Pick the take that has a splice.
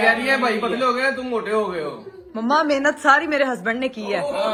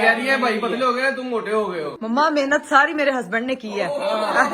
second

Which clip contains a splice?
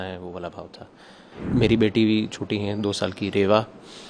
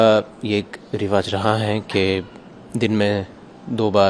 first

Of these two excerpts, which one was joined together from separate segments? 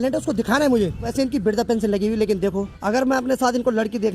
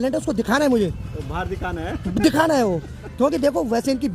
first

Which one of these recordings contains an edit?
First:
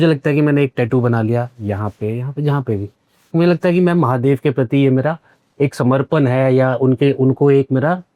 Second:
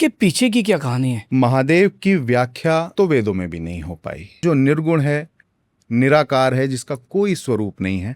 second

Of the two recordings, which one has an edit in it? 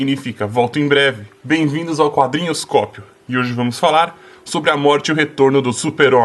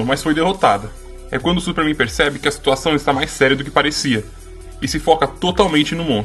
second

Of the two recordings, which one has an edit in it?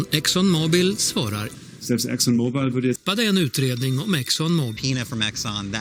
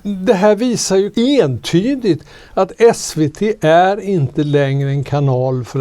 second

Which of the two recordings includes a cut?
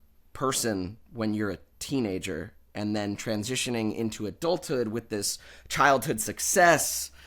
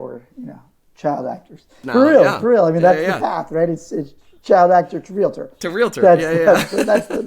second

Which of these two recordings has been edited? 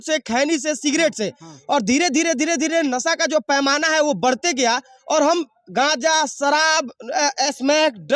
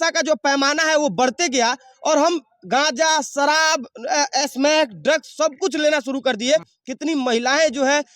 second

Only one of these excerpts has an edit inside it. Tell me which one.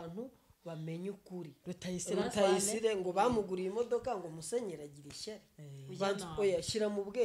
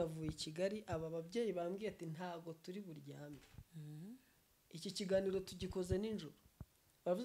first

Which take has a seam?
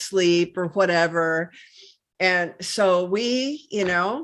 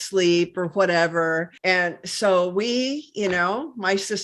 second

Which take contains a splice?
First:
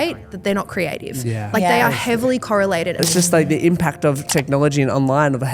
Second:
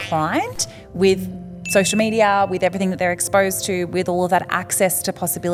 first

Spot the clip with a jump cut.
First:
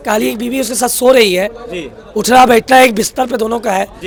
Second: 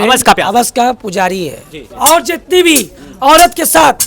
second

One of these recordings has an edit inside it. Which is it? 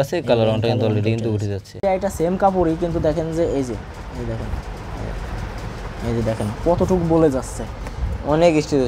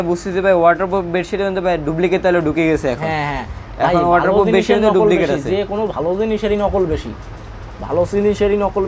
first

